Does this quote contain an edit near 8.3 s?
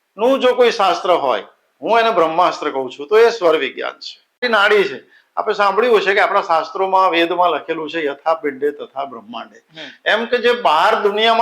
no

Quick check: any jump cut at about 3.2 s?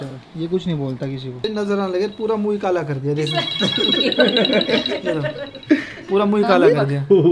no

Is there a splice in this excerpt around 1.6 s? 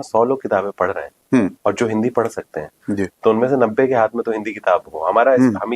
no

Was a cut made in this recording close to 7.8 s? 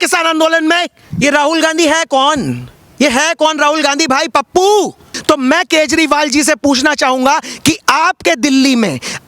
no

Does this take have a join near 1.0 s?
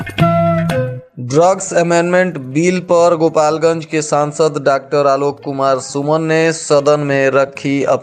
yes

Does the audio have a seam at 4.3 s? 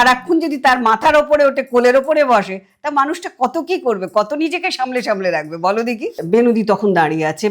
no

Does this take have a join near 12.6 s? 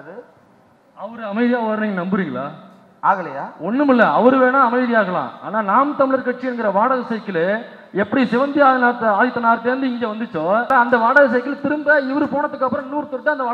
no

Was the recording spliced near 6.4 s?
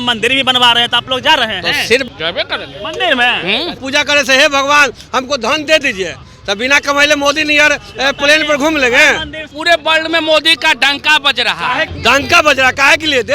no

